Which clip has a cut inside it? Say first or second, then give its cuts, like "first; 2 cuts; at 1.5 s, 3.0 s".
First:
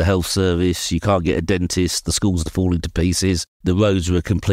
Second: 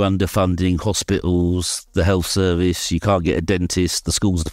first; 1 cut; at 3.5 s